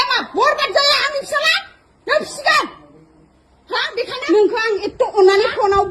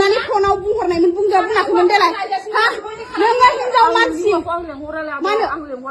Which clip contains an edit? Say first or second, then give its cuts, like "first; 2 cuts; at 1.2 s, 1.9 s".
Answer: first; 1 cut; at 4.2 s